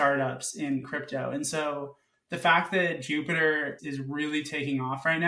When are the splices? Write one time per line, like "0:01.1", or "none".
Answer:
0:00.8
0:03.8